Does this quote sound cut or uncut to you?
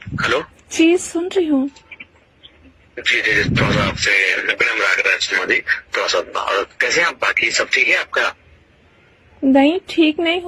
uncut